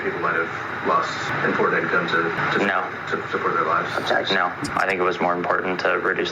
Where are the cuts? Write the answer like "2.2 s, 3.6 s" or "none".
3.9 s, 4.6 s